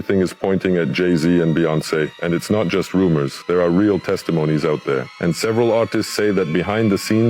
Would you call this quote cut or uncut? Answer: cut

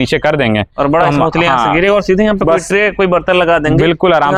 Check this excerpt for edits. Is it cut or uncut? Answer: uncut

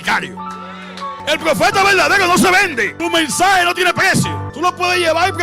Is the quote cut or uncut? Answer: cut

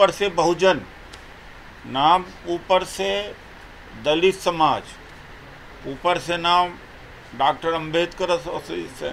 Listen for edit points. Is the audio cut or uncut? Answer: uncut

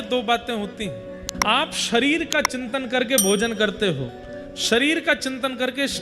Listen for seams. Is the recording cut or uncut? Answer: cut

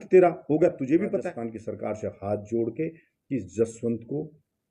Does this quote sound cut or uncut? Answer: cut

